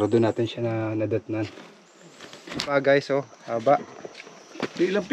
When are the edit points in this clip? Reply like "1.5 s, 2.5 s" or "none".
2.7 s